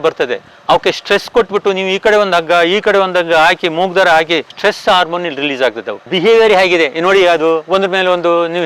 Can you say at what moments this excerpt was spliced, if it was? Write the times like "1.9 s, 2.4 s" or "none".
4.5 s, 6.0 s